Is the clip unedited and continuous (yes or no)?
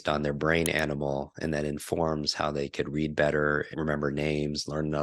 no